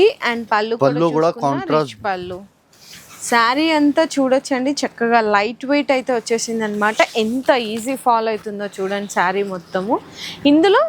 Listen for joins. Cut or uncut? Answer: uncut